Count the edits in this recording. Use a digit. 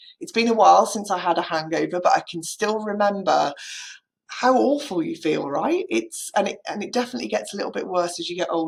0